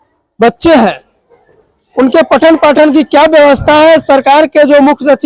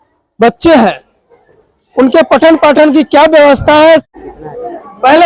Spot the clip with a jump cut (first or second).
second